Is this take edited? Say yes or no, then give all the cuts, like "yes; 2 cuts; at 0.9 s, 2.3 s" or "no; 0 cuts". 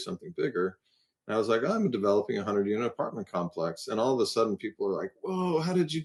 no; 0 cuts